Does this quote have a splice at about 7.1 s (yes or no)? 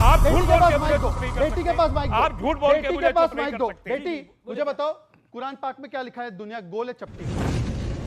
yes